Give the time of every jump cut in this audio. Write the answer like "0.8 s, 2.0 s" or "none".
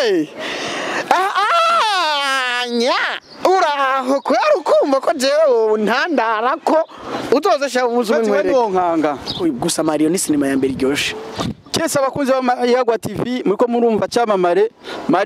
9.4 s